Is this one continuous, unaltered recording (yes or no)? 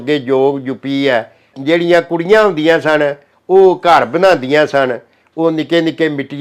no